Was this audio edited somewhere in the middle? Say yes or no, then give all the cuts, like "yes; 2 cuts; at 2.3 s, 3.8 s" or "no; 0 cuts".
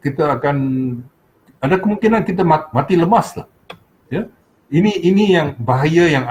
no; 0 cuts